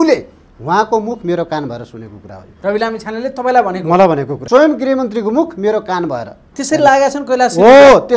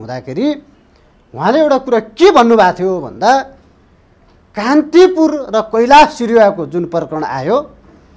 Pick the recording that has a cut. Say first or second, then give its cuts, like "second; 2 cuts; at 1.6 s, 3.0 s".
first; 1 cut; at 4.3 s